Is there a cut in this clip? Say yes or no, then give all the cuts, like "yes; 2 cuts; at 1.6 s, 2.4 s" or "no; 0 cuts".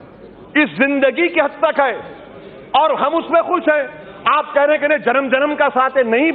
no; 0 cuts